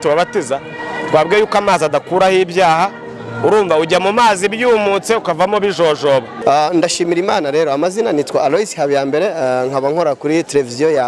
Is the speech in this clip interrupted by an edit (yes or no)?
yes